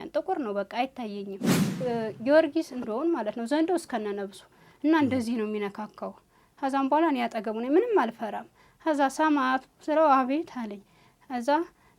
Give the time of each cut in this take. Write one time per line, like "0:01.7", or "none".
0:01.6
0:02.9